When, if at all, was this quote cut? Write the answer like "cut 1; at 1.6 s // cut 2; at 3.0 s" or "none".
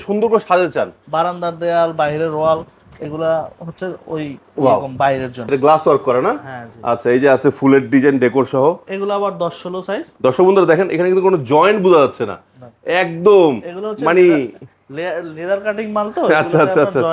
cut 1; at 5.5 s // cut 2; at 10.1 s